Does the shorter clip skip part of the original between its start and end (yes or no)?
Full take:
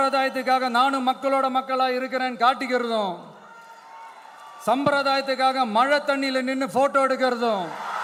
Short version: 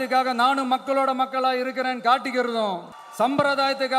yes